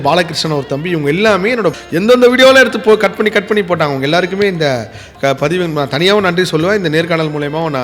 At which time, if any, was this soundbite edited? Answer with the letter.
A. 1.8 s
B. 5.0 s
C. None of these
A